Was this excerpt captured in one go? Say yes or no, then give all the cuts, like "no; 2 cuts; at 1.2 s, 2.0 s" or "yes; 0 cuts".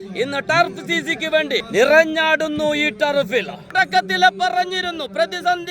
no; 2 cuts; at 1.7 s, 3.6 s